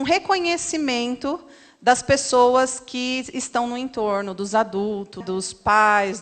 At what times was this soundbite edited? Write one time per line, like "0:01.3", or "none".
0:05.2